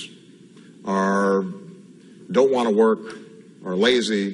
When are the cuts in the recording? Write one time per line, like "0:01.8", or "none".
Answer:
none

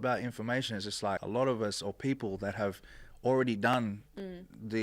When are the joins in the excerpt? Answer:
0:01.2

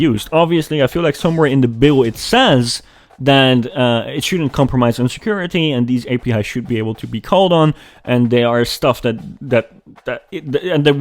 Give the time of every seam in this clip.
none

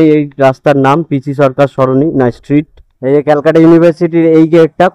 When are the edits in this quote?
none

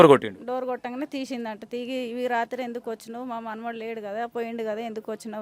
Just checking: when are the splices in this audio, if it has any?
none

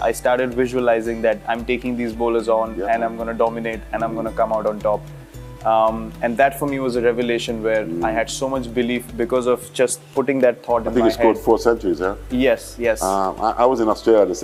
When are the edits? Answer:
none

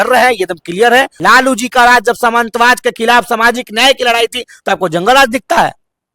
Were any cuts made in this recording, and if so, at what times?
0:01.1

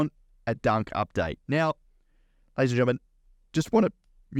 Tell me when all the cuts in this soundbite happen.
none

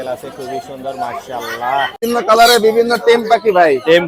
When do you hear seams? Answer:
0:02.0

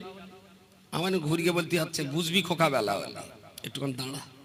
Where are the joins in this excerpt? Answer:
none

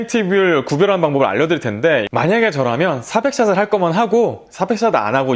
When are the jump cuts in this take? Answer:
0:02.1

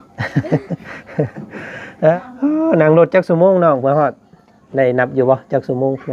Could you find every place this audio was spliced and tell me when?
0:02.2

